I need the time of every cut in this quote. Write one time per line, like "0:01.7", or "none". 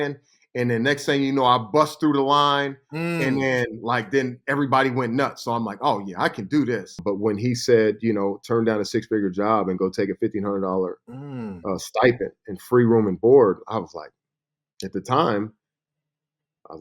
0:06.8